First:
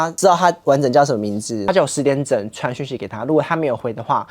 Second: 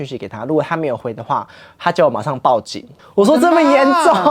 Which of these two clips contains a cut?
first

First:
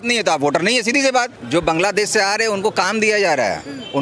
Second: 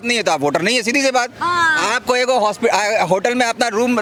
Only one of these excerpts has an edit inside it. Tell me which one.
first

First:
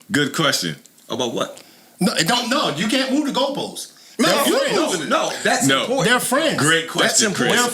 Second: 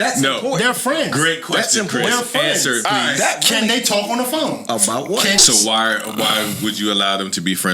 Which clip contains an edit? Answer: second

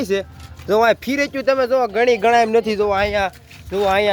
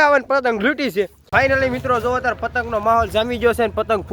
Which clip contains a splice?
second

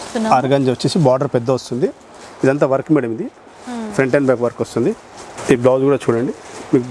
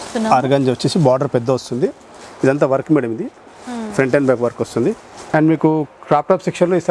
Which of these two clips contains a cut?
second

